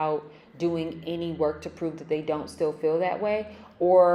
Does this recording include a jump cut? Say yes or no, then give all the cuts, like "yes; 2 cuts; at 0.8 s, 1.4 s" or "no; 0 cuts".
no; 0 cuts